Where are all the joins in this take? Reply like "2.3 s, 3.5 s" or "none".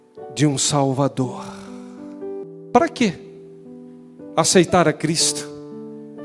2.4 s